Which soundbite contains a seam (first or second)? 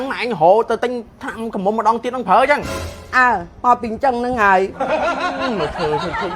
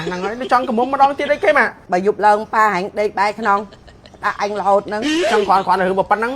second